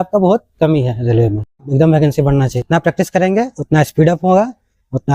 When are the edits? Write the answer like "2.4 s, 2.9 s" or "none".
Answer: 1.7 s, 2.6 s